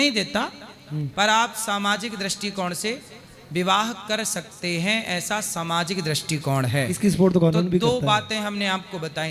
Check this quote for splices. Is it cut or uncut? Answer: uncut